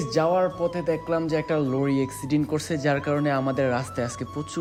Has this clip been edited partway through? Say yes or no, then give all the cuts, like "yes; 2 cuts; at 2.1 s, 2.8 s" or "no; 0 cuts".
no; 0 cuts